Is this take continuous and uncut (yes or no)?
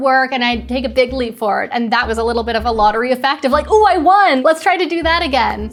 yes